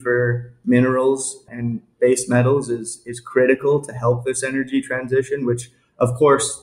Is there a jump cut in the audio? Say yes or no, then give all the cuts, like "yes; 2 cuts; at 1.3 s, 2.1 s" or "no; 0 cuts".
no; 0 cuts